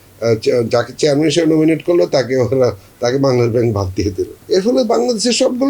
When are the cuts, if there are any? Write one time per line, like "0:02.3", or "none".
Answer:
0:04.3

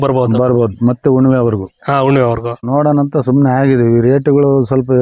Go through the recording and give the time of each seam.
0:02.6

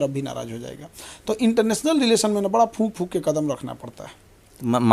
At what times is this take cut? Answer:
none

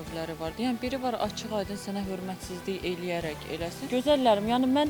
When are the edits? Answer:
0:03.9

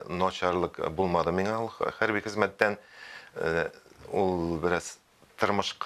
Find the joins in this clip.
none

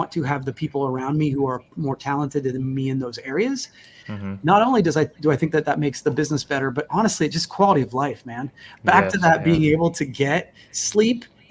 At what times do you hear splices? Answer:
none

